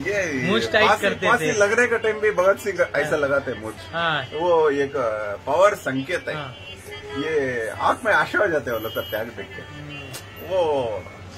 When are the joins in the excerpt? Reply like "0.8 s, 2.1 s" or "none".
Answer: none

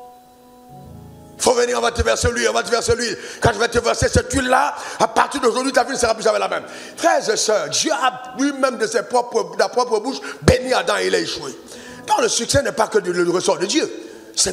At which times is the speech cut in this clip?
none

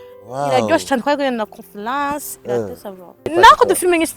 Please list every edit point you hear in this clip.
3.3 s

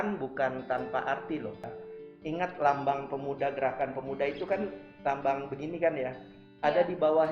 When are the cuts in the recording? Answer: 1.8 s

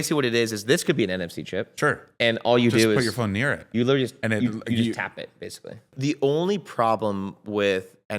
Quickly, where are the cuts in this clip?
5.9 s

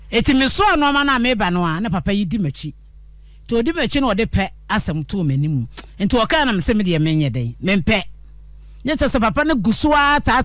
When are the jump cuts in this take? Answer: none

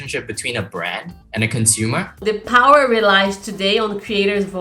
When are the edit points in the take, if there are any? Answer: 1.2 s, 2.2 s

